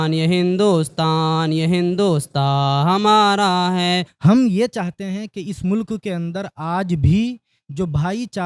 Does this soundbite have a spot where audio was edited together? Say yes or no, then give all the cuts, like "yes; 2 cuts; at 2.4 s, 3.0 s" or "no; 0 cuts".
yes; 1 cut; at 4.1 s